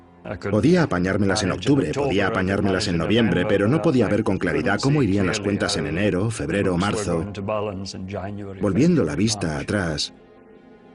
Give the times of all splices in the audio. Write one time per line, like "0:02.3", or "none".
0:05.2